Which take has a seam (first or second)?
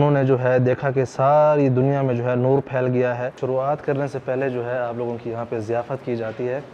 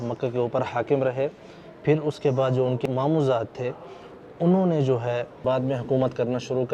first